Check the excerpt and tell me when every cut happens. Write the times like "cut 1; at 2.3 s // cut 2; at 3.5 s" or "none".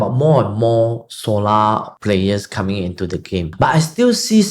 cut 1; at 1.9 s // cut 2; at 3.5 s